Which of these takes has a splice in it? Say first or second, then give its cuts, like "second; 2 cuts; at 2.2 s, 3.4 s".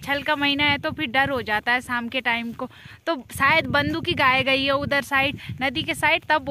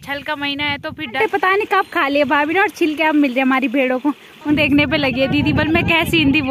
second; 2 cuts; at 1.2 s, 4.6 s